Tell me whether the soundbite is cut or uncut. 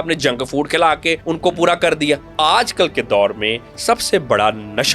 cut